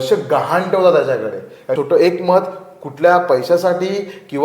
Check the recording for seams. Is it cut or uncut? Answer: cut